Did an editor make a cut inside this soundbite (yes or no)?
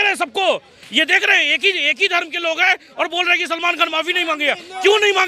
no